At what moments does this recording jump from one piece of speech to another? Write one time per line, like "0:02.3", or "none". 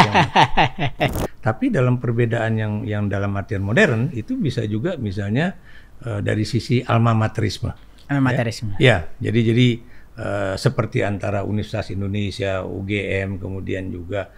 0:01.2

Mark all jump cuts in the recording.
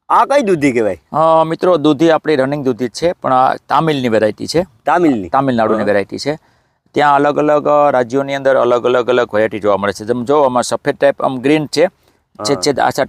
none

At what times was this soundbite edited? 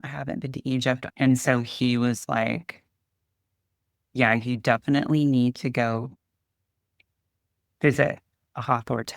0:01.0

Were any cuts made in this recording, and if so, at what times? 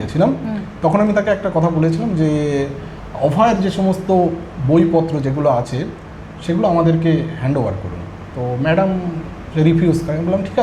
none

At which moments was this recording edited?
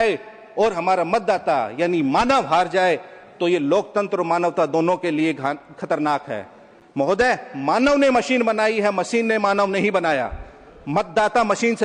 none

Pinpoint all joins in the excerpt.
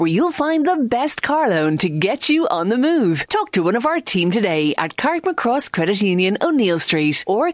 none

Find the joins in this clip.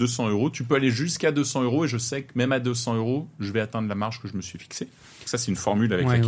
none

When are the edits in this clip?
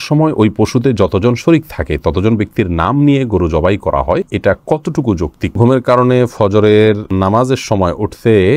0:04.3
0:05.6
0:07.1

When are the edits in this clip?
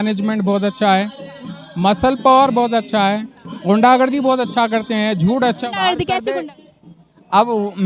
0:06.3

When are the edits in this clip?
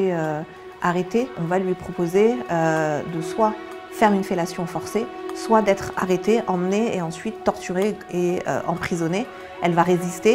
0:01.4

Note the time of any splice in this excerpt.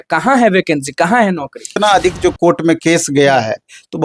0:01.8

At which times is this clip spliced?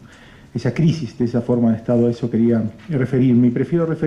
0:01.3

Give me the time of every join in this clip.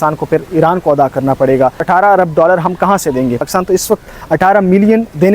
0:01.8
0:03.4

